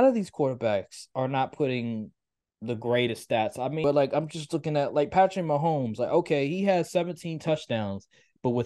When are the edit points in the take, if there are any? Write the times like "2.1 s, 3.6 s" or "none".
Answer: 3.8 s